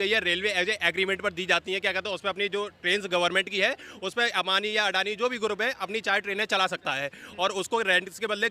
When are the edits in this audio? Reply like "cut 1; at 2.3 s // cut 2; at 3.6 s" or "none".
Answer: none